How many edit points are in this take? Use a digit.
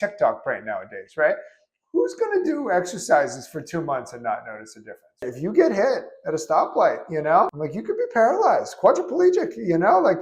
1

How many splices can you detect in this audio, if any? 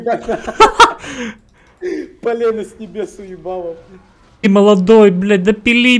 1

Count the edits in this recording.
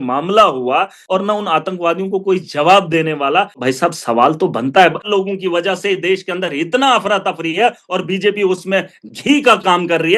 3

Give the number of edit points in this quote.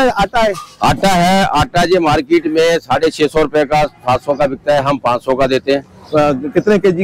0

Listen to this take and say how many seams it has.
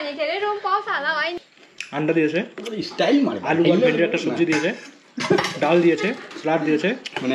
1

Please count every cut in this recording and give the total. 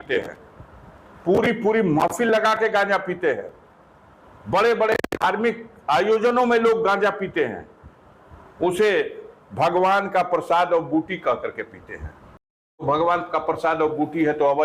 1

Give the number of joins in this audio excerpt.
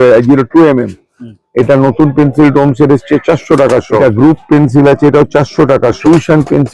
2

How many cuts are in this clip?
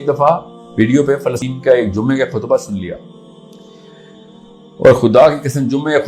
1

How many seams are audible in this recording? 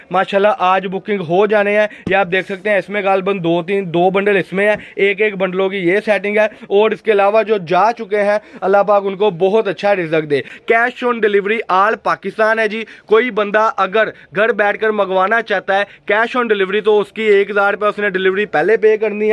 1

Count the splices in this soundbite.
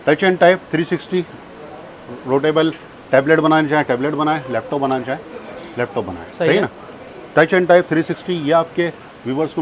0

